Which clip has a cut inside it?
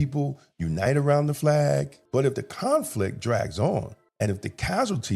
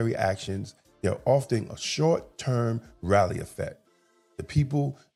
first; 2 cuts; at 2.0 s, 4.0 s

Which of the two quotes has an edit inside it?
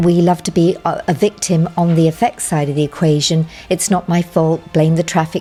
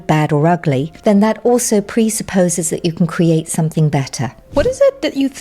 second; 2 cuts; at 0.9 s, 4.4 s

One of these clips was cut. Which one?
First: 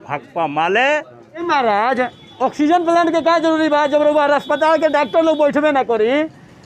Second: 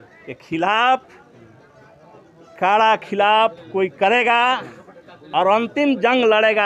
first; 1 cut; at 1.3 s

